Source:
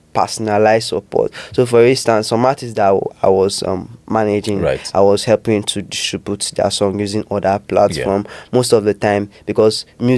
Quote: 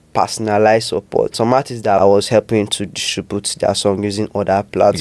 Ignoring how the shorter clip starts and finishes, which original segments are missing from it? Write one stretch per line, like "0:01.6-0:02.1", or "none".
0:01.5-0:04.5